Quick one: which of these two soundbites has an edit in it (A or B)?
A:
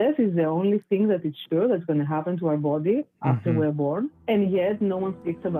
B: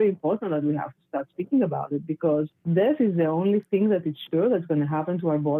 A